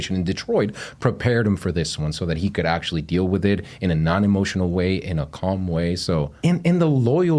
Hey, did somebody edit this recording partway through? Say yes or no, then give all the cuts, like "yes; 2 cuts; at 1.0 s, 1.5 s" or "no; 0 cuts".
yes; 1 cut; at 6.3 s